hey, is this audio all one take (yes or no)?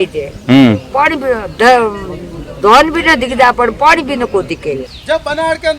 no